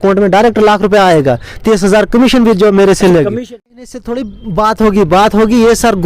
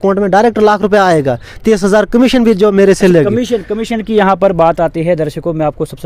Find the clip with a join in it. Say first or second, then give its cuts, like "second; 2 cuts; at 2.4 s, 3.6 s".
first; 1 cut; at 3.9 s